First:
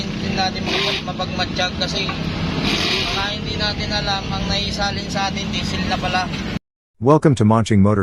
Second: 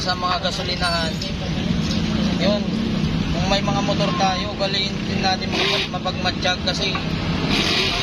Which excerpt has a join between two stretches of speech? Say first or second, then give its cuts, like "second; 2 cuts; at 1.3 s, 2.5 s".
first; 1 cut; at 6.7 s